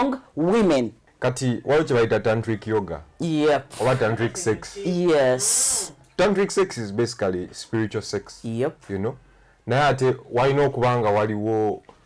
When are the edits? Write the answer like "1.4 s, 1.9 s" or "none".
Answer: 1.0 s